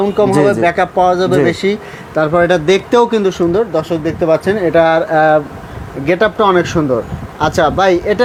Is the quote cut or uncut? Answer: uncut